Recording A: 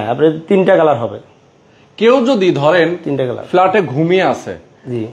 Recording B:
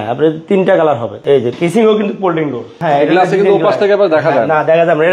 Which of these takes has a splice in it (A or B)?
B